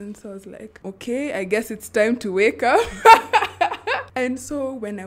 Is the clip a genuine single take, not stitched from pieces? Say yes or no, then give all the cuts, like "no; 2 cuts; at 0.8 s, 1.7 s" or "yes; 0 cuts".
no; 2 cuts; at 0.8 s, 4.1 s